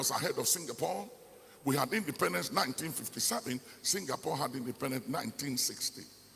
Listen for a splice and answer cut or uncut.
uncut